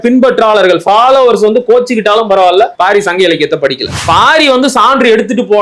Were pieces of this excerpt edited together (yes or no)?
yes